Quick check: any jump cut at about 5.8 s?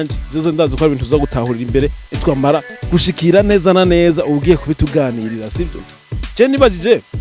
yes; 1 cut; at 5.8 s

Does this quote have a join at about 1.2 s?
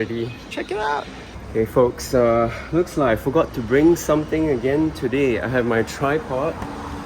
yes; 1 cut; at 1.2 s

